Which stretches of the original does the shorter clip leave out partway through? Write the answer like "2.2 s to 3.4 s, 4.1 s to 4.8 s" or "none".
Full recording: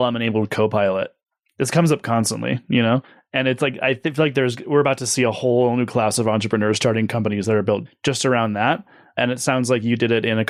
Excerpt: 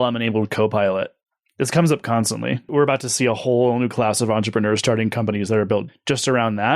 2.6 s to 4.6 s